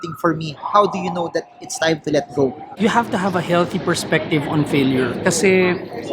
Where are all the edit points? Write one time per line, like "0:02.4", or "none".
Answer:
0:02.6